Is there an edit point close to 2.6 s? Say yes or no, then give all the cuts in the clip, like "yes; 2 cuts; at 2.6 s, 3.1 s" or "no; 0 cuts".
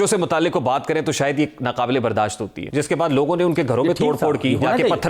yes; 1 cut; at 2.6 s